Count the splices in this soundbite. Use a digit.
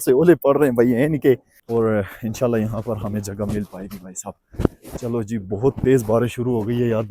1